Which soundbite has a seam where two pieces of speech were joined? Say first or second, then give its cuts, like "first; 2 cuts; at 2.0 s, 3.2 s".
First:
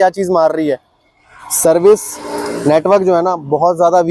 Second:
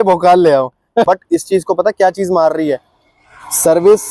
second; 1 cut; at 1.0 s